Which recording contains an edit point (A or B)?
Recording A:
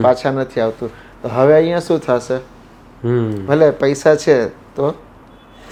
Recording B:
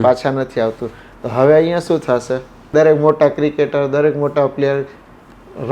B